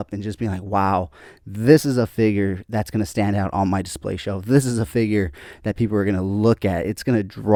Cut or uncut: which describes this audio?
uncut